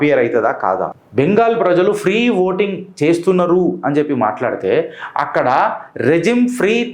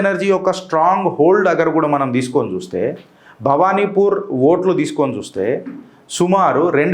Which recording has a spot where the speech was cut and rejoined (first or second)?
first